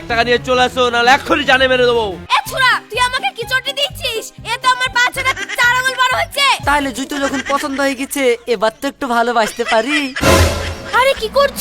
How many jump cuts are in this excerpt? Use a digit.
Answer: 3